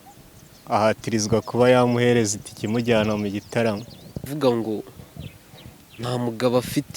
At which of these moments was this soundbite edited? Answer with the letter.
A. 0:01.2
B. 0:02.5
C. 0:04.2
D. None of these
C